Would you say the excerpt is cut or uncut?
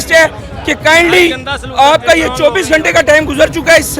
uncut